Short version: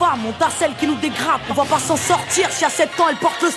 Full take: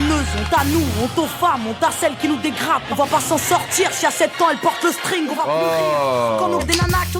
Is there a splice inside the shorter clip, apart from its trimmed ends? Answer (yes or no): no